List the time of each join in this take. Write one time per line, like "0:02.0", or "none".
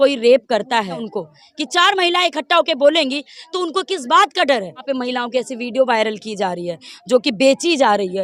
0:01.0
0:04.8